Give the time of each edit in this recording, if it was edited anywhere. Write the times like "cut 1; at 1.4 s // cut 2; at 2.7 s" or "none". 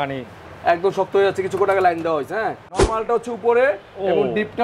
cut 1; at 2.9 s